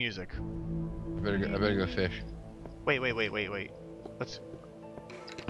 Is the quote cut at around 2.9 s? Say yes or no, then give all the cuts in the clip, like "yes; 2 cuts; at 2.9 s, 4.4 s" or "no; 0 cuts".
yes; 1 cut; at 2.9 s